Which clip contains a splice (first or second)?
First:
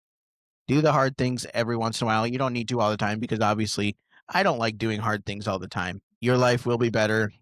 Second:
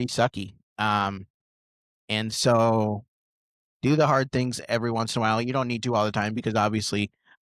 first